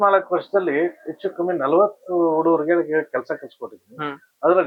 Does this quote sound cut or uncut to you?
uncut